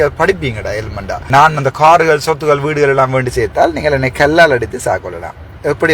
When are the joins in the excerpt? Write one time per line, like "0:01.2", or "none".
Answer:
0:01.3